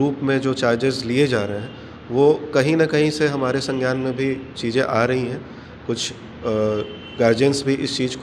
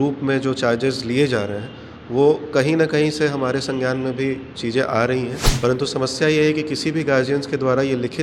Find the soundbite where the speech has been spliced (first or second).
second